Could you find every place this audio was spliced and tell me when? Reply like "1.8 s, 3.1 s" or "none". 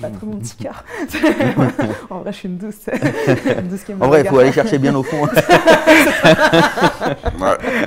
none